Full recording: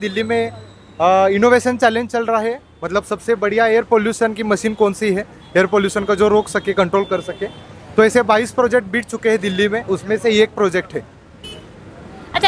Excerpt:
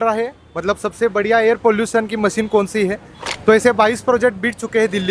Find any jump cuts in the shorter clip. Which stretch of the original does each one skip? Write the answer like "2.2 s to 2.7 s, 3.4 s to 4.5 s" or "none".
5.4 s to 7.6 s